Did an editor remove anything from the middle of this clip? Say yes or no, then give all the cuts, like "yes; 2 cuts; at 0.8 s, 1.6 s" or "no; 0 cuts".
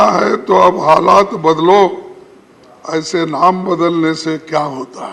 no; 0 cuts